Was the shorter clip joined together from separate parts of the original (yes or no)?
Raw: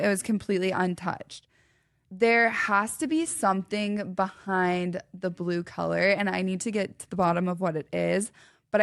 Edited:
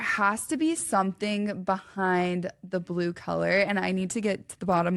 no